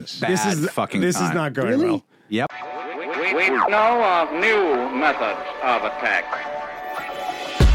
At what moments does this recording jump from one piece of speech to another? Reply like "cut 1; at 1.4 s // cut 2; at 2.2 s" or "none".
cut 1; at 2.5 s